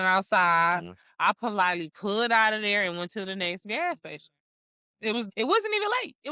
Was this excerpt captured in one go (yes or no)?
no